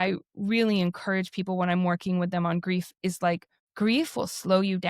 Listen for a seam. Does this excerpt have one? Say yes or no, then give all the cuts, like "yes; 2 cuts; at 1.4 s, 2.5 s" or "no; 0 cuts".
yes; 1 cut; at 3.2 s